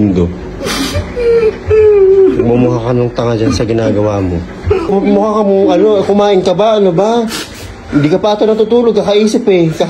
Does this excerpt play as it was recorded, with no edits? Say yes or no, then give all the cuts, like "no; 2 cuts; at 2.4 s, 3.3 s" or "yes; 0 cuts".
no; 1 cut; at 4.9 s